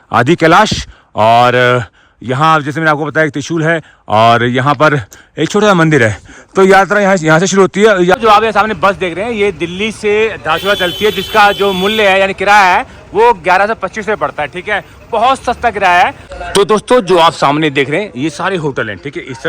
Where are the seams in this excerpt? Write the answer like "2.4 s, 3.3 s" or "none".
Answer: 8.1 s, 16.3 s